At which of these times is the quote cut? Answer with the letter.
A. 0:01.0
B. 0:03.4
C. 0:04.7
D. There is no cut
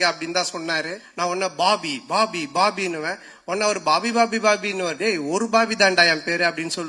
A